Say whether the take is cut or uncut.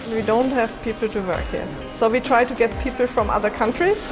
cut